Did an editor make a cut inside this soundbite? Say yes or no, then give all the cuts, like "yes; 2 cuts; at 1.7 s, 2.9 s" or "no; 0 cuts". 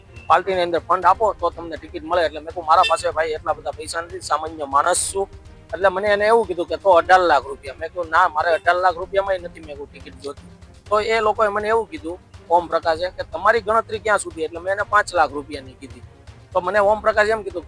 no; 0 cuts